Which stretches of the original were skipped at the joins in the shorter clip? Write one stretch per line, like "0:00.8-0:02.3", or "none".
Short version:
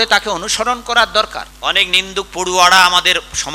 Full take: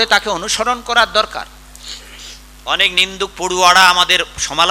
0:01.4-0:02.5